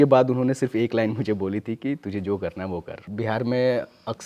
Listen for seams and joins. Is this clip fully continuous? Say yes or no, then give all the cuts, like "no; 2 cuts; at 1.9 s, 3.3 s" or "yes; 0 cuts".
no; 1 cut; at 3.1 s